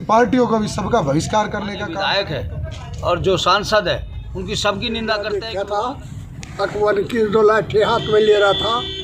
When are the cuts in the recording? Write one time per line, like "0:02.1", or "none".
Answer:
0:01.9
0:05.3